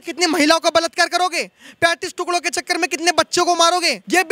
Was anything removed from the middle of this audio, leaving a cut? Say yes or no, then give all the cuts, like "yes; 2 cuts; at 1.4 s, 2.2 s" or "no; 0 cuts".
no; 0 cuts